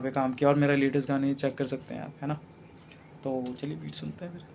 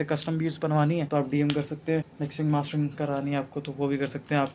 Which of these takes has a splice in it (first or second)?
second